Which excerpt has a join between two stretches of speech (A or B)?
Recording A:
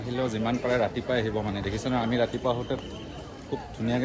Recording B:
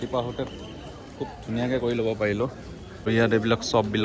B